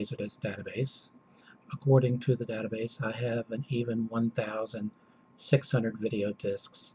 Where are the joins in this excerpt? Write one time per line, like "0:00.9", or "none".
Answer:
0:01.6